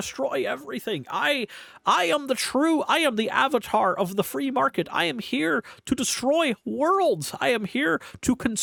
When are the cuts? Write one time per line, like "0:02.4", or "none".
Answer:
none